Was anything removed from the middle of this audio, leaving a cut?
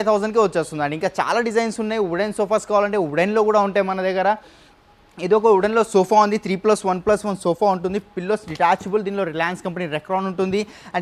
no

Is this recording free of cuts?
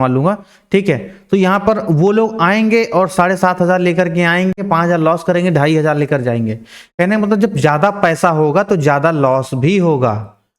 no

